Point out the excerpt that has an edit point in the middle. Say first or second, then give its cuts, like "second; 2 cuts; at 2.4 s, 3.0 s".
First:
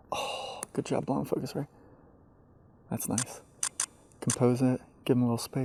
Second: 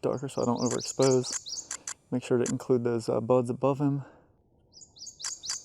second; 1 cut; at 4.4 s